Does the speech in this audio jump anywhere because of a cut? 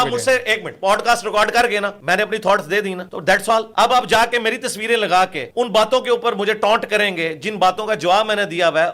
yes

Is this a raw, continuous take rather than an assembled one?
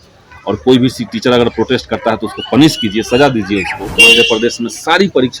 no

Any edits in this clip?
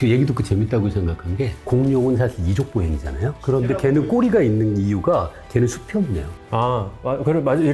no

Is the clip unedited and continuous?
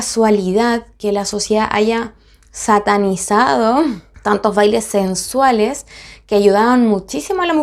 yes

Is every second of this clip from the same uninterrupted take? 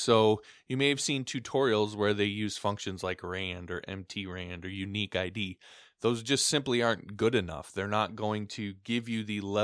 yes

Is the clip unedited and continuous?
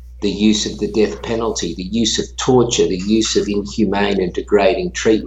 yes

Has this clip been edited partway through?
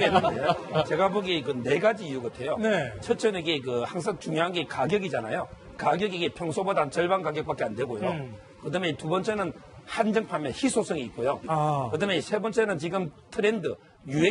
no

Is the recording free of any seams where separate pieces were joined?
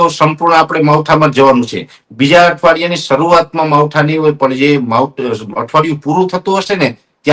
yes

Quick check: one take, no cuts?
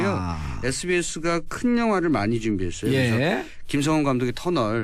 no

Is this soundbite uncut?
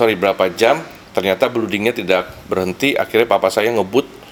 yes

